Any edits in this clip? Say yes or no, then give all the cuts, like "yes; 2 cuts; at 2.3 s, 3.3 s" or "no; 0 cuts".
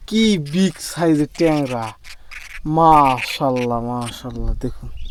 no; 0 cuts